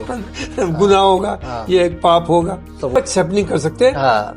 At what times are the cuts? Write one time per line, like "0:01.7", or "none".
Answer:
0:02.9